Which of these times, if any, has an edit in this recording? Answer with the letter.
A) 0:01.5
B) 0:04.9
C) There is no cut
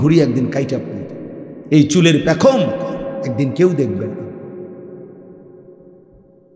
C